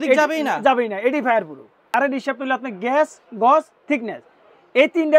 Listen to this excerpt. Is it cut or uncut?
cut